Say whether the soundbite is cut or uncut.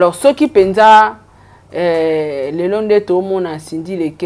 uncut